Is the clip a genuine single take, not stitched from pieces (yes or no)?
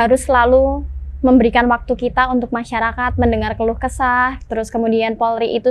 yes